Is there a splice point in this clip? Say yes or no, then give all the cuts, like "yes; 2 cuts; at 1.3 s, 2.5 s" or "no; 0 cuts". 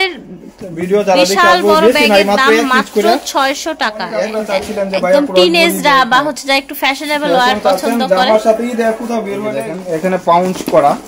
yes; 2 cuts; at 4.3 s, 9.6 s